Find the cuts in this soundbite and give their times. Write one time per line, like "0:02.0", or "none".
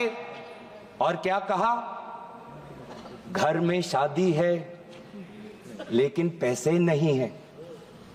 none